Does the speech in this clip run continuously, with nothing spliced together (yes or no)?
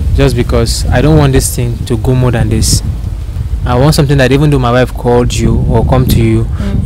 yes